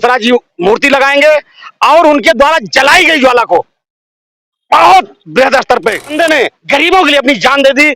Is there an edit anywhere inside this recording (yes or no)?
yes